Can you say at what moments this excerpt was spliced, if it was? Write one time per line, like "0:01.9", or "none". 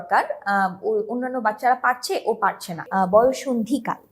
0:02.8